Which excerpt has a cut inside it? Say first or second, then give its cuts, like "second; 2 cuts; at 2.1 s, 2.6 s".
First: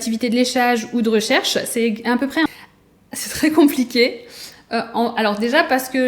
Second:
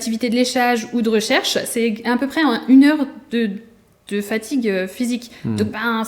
first; 1 cut; at 2.5 s